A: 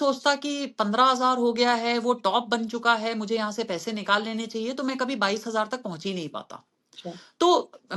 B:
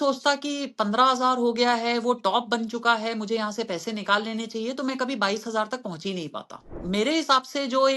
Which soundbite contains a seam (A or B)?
B